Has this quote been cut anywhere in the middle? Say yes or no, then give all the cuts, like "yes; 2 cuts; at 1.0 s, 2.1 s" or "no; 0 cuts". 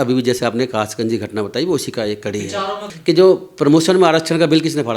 yes; 1 cut; at 2.9 s